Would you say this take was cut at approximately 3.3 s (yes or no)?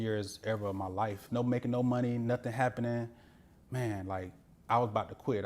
no